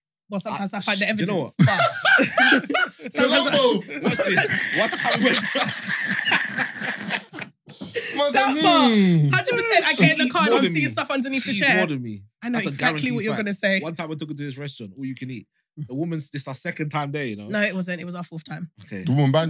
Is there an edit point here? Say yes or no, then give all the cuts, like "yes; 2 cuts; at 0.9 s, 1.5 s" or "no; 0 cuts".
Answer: no; 0 cuts